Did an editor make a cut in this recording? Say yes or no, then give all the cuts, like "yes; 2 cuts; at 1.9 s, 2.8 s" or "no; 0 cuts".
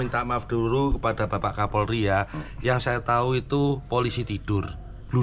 no; 0 cuts